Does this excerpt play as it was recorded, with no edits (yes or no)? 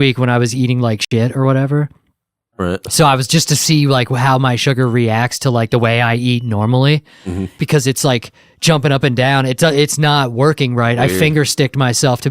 no